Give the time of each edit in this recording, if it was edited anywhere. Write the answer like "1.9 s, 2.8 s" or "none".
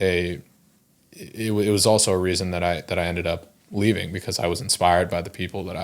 none

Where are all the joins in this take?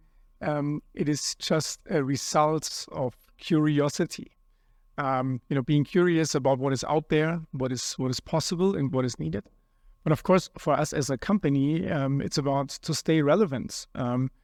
none

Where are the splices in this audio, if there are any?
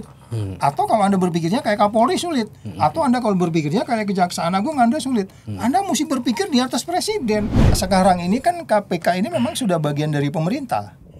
7.8 s

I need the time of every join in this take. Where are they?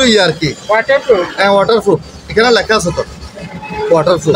none

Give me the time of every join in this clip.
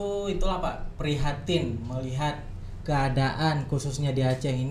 none

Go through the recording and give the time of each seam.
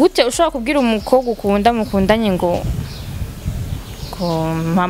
none

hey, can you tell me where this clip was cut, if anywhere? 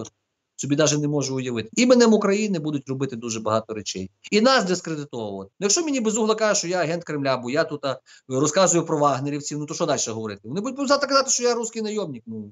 1.7 s, 5.4 s

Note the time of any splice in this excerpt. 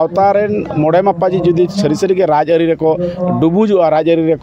none

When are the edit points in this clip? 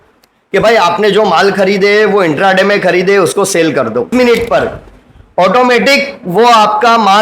4.1 s

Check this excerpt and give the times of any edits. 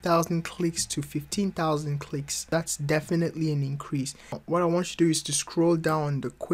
2.5 s, 4.4 s

